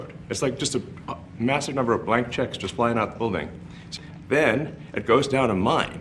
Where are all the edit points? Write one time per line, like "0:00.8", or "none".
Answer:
0:03.8